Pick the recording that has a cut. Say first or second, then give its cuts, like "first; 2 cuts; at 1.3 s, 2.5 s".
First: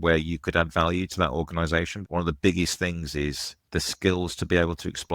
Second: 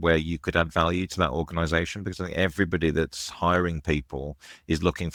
first; 2 cuts; at 2.0 s, 3.5 s